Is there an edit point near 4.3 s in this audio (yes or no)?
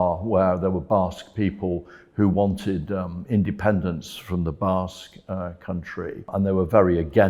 no